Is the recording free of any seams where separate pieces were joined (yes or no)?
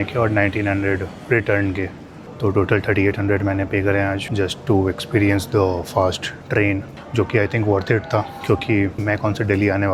yes